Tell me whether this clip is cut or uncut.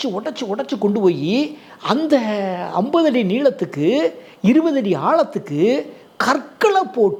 uncut